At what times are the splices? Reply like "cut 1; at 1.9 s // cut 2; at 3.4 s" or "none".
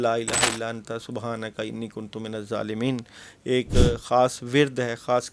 none